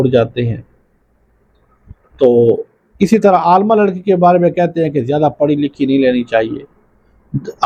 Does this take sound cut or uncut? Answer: uncut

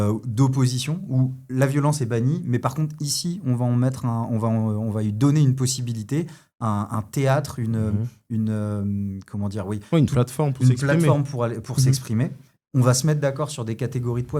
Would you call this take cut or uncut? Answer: uncut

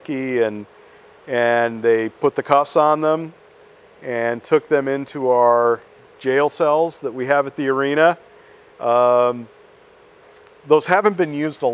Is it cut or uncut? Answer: uncut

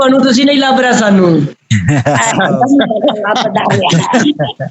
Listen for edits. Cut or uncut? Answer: uncut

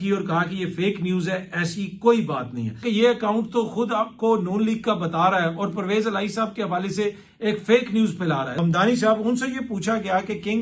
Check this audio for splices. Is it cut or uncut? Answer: cut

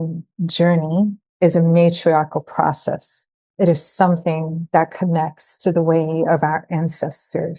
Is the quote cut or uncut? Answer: cut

